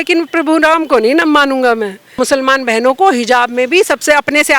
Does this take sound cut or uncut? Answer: cut